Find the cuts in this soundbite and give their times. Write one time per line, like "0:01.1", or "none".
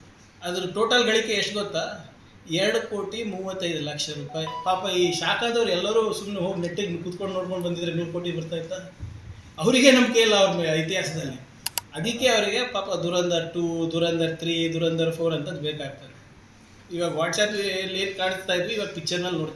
none